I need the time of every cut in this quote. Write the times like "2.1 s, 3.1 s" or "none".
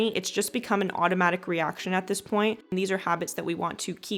2.7 s